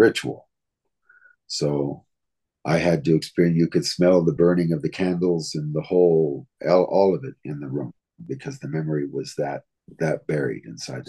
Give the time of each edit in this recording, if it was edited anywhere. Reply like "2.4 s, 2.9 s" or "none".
9.8 s